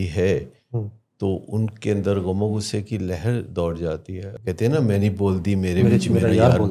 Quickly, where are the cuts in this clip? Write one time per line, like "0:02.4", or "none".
none